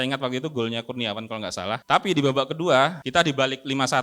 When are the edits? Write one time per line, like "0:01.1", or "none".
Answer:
0:01.8
0:03.0